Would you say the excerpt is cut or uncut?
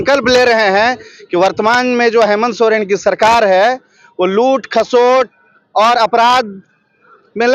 uncut